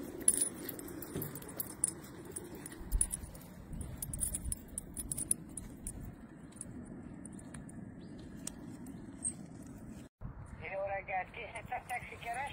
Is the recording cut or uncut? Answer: cut